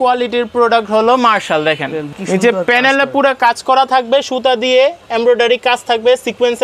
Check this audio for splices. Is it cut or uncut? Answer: cut